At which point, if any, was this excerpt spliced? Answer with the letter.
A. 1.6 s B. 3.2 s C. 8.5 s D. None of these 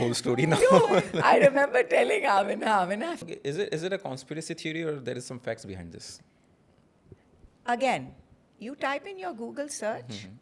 B